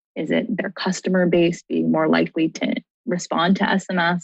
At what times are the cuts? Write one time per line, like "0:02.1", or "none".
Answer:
0:02.9